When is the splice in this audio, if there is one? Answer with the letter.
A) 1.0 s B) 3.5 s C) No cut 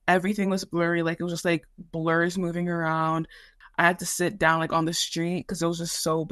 B